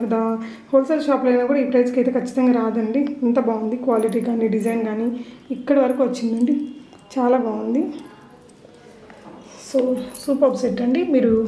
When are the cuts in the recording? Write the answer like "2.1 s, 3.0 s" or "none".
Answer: none